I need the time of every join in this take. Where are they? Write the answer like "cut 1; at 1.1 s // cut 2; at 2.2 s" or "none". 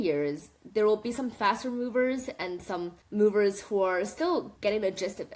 cut 1; at 3.0 s // cut 2; at 4.5 s